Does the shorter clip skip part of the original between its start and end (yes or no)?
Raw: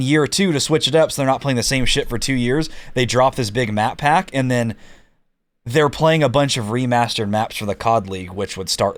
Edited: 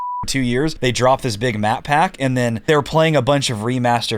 yes